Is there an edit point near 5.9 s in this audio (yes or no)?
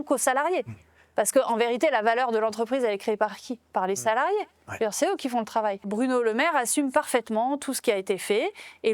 yes